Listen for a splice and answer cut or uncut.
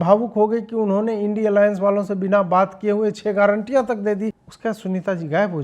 cut